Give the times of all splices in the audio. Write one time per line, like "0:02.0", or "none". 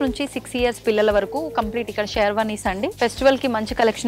0:02.9